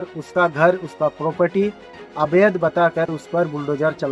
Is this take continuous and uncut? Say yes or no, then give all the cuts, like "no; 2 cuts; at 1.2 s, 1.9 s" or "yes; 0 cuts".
yes; 0 cuts